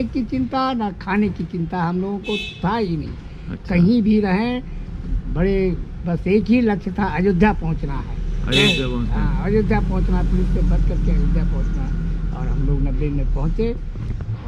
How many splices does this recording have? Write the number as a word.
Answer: zero